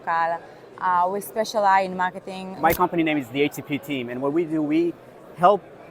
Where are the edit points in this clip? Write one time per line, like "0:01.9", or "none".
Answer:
0:02.5